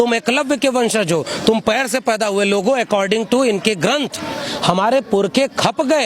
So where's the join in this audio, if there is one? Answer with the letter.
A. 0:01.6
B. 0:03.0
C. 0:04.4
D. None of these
C